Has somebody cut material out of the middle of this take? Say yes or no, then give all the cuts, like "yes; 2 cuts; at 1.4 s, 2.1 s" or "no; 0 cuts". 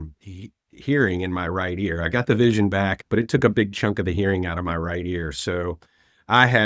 yes; 1 cut; at 3.0 s